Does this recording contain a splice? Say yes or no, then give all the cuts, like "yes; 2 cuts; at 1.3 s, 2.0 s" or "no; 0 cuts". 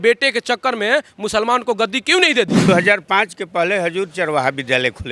yes; 1 cut; at 2.6 s